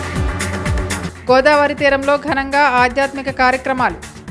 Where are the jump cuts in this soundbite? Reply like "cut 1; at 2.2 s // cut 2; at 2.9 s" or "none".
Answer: cut 1; at 1.0 s